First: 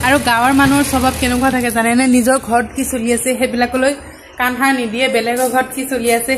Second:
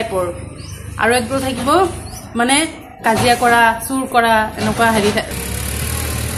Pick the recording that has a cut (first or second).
second